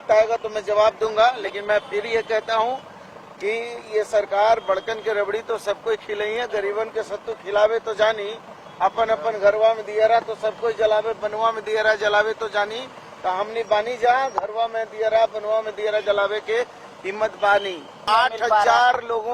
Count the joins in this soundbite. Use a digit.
1